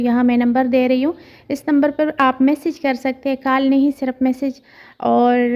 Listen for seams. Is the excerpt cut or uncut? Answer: uncut